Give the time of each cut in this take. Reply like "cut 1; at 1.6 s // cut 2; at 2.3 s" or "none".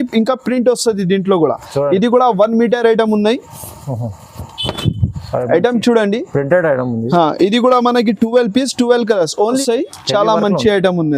cut 1; at 9.6 s